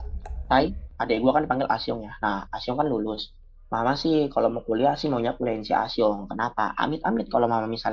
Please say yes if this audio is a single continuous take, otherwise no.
no